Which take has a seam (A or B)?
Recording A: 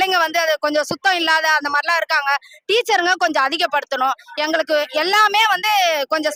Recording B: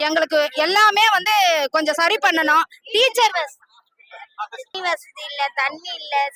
B